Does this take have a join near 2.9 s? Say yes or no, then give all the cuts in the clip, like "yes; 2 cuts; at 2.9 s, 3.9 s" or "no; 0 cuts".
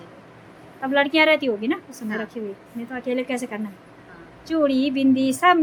no; 0 cuts